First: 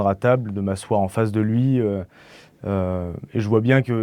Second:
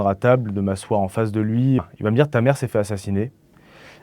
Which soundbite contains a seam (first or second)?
second